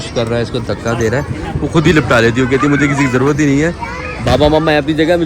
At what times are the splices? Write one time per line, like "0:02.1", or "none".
none